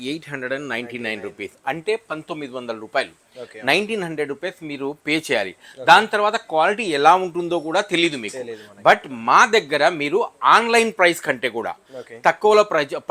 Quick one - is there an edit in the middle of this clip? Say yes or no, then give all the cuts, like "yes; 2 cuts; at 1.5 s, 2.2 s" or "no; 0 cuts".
no; 0 cuts